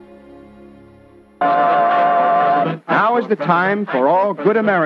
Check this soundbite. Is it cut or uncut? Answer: cut